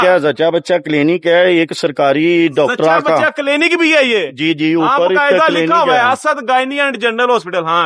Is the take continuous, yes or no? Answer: yes